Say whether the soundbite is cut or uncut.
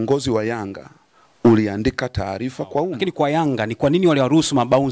cut